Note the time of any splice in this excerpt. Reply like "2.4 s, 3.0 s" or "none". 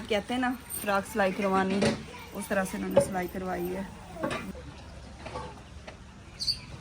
4.5 s